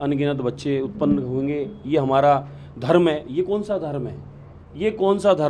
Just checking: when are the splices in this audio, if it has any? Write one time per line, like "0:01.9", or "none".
none